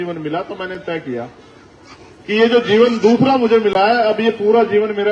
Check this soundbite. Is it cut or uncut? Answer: uncut